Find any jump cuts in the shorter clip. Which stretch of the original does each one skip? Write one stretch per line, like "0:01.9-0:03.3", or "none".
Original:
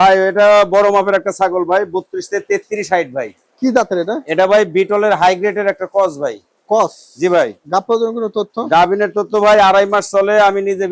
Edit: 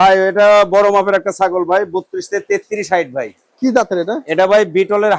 none